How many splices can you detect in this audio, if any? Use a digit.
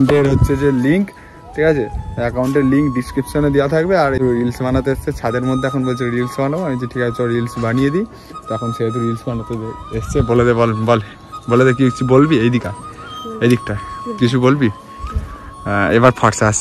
1